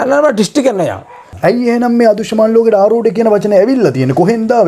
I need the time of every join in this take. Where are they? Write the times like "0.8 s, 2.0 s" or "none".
1.2 s